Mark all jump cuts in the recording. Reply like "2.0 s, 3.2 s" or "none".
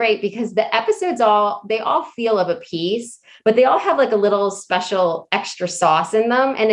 none

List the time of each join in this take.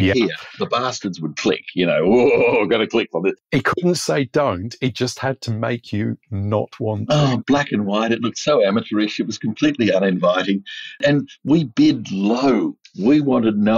3.4 s

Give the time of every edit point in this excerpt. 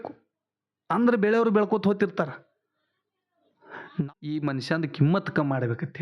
4.0 s

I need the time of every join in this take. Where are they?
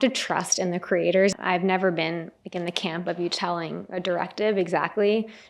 1.3 s

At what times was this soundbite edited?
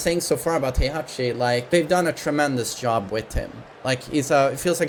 none

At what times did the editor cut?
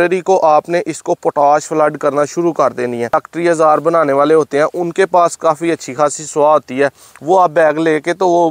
3.1 s

